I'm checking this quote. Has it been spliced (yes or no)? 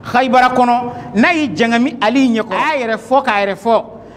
yes